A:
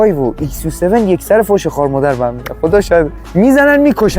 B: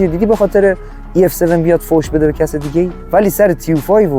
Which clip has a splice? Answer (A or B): A